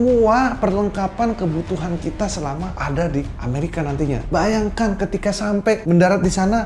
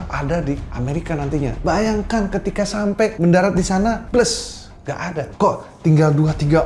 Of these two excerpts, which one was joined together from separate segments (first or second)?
second